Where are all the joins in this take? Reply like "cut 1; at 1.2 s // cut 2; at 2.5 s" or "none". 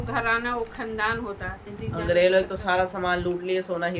cut 1; at 1.7 s

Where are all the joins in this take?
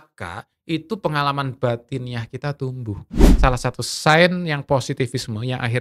cut 1; at 3.2 s

